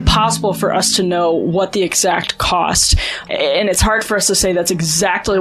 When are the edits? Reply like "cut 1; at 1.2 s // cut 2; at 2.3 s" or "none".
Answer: cut 1; at 3.1 s